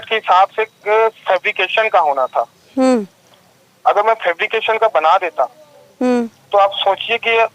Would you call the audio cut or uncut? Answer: uncut